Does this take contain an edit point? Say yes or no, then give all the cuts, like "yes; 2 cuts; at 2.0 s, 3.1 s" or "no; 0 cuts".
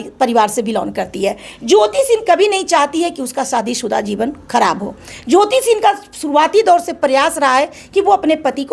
no; 0 cuts